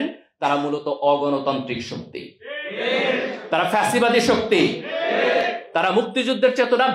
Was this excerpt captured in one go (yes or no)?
yes